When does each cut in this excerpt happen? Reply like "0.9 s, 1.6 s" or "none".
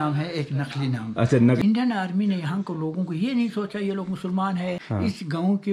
1.6 s, 4.8 s